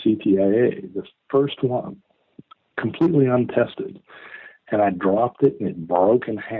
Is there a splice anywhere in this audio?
no; 0 cuts

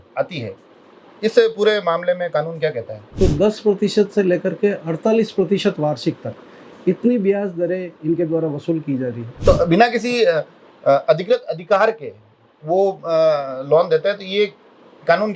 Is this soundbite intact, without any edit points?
no; 2 cuts; at 3.1 s, 9.4 s

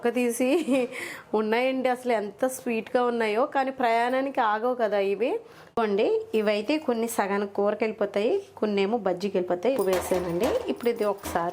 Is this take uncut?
no; 2 cuts; at 5.6 s, 9.8 s

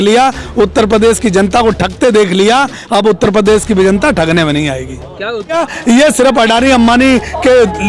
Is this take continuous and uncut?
no; 1 cut; at 5.6 s

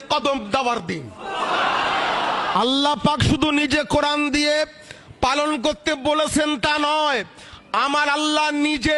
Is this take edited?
yes; 1 cut; at 2.5 s

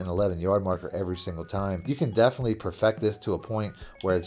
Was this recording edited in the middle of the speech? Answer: yes; 1 cut; at 1.9 s

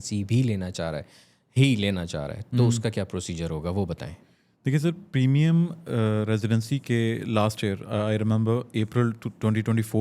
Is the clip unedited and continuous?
yes; 0 cuts

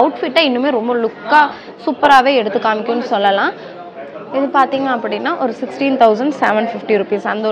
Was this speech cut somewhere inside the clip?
yes; 1 cut; at 3.8 s

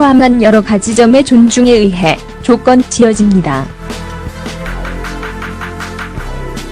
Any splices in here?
yes; 1 cut; at 3.0 s

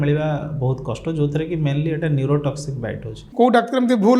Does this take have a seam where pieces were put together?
yes; 1 cut; at 3.2 s

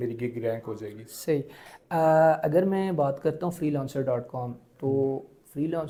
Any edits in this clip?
no; 0 cuts

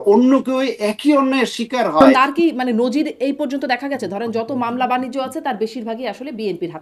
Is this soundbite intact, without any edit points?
no; 1 cut; at 2.0 s

